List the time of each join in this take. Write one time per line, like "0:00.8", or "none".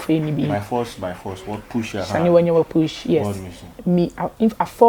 0:03.7